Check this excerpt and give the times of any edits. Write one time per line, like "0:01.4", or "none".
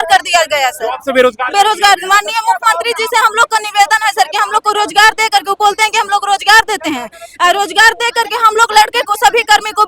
none